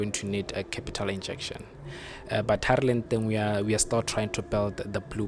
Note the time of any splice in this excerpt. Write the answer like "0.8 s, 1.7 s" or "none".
none